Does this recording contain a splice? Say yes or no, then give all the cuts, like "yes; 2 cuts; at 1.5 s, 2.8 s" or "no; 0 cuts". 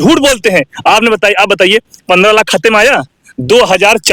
no; 0 cuts